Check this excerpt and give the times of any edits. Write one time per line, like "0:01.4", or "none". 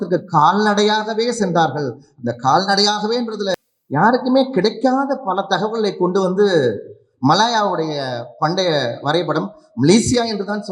0:03.7